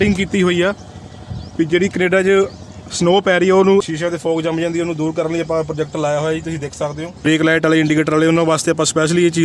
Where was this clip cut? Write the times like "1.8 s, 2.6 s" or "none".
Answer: 3.9 s, 7.2 s